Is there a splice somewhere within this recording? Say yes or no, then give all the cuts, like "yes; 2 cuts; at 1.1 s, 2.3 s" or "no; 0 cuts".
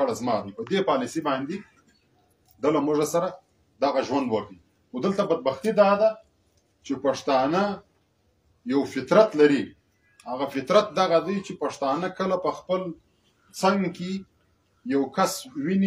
no; 0 cuts